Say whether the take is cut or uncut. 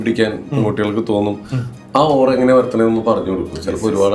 uncut